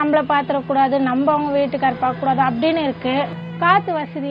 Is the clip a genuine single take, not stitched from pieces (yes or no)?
no